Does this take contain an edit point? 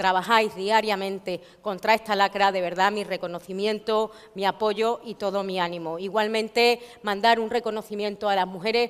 yes; 1 cut; at 4.4 s

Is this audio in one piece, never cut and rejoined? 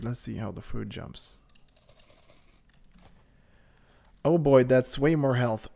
yes; 0 cuts

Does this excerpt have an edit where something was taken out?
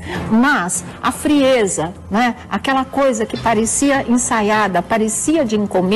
no; 0 cuts

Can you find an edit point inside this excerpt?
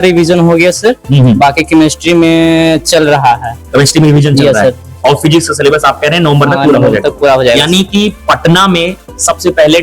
no; 0 cuts

